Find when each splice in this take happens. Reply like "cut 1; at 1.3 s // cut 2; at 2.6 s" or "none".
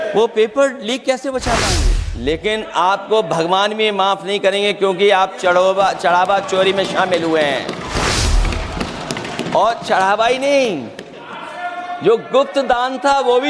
cut 1; at 2.0 s